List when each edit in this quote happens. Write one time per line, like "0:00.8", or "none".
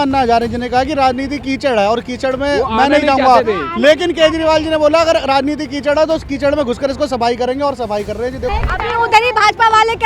0:08.5